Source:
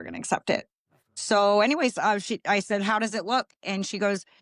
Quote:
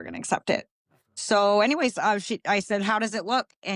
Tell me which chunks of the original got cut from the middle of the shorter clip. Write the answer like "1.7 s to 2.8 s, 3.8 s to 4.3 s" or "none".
none